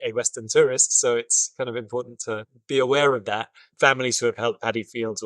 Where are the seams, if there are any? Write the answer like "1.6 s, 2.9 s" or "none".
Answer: 3.6 s